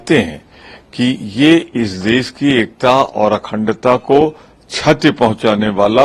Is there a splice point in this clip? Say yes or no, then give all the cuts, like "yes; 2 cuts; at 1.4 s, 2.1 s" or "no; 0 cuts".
no; 0 cuts